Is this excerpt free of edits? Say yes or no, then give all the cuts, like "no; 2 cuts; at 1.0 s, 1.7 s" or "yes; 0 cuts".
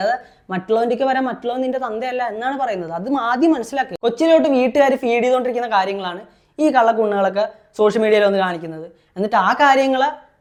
yes; 0 cuts